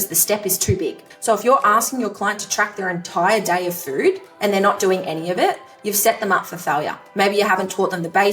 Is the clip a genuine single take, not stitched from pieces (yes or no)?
no